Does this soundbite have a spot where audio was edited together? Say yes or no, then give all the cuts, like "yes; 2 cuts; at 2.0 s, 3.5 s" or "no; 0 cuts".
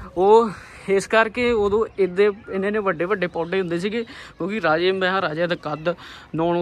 no; 0 cuts